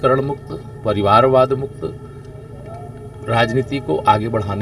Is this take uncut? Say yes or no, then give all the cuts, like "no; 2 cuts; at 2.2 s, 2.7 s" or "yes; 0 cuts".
yes; 0 cuts